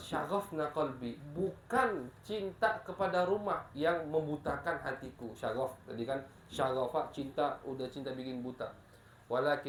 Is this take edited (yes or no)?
no